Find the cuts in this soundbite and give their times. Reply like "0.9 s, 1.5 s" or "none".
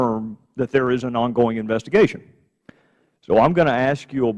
3.4 s